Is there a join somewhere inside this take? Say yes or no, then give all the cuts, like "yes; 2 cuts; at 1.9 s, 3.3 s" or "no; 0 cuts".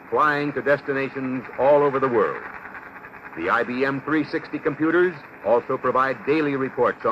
no; 0 cuts